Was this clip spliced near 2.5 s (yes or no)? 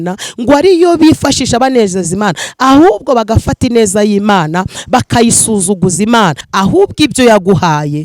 no